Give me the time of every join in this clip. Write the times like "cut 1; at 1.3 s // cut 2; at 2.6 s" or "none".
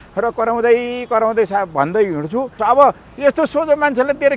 cut 1; at 2.5 s